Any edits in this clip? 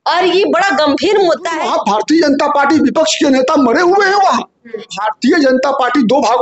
yes; 2 cuts; at 1.7 s, 5.0 s

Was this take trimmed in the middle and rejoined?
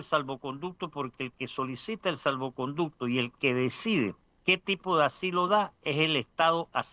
yes; 1 cut; at 4.3 s

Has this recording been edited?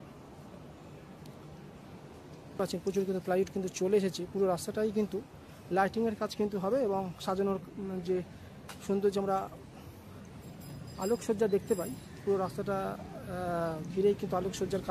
yes; 1 cut; at 2.6 s

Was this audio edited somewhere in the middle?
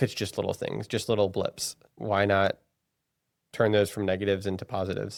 no; 0 cuts

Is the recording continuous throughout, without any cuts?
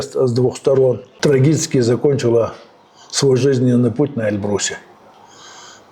no; 1 cut; at 1.2 s

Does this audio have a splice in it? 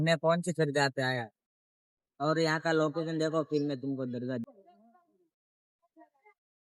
no; 0 cuts

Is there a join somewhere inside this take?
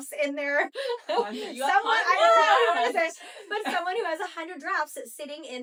no; 0 cuts

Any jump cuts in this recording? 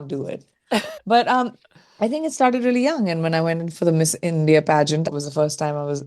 yes; 2 cuts; at 0.9 s, 5.1 s

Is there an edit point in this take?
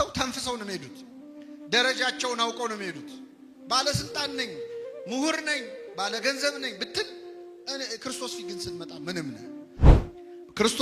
yes; 1 cut; at 9.9 s

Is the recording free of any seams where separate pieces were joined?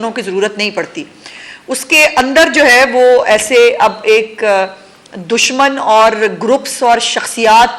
yes; 0 cuts

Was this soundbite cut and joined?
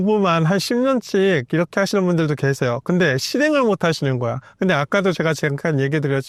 no; 0 cuts

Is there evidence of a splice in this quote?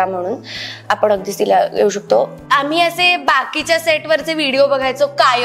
yes; 1 cut; at 2.4 s

